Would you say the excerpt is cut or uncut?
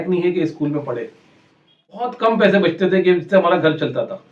cut